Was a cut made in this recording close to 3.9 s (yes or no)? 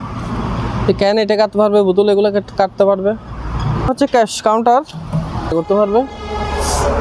yes